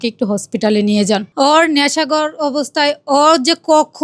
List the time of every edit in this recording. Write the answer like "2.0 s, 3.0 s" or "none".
1.3 s